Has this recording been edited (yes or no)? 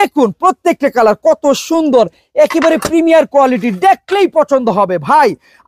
no